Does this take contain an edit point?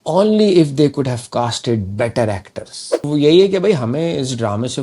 yes; 1 cut; at 3.1 s

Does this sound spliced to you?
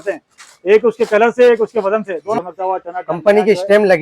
yes; 1 cut; at 2.4 s

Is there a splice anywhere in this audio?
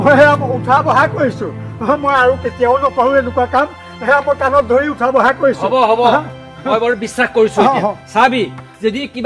no; 0 cuts

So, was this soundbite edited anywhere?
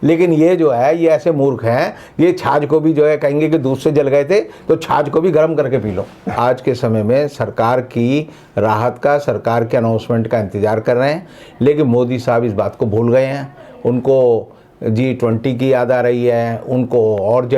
yes; 1 cut; at 6.3 s

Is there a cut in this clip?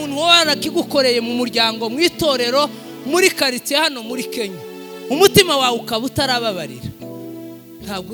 no; 0 cuts

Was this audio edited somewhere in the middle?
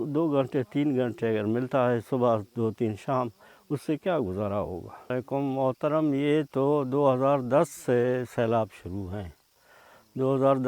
yes; 1 cut; at 5.1 s

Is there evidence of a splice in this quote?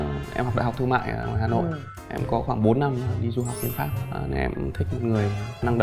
no; 0 cuts

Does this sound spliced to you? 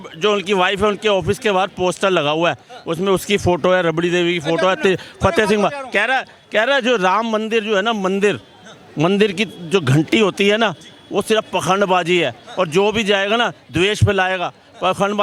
no; 0 cuts

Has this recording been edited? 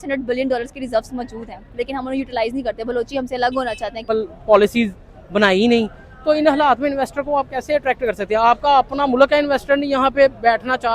yes; 1 cut; at 4.1 s

